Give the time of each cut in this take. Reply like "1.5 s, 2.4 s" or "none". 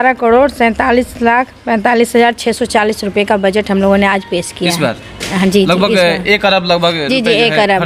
none